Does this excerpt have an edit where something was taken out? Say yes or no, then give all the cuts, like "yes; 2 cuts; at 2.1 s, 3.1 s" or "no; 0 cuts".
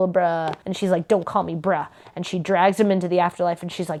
no; 0 cuts